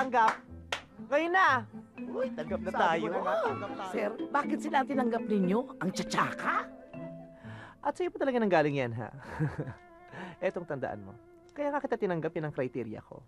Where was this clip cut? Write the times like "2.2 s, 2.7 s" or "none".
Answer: 3.7 s